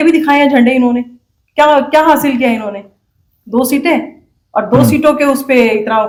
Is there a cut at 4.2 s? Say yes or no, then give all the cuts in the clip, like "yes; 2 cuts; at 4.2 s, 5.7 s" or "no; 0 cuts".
no; 0 cuts